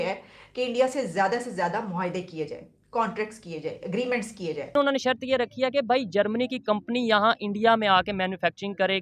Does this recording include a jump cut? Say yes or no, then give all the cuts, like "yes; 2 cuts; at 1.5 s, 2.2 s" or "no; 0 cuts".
yes; 1 cut; at 4.7 s